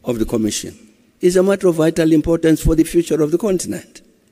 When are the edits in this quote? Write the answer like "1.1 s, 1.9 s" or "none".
none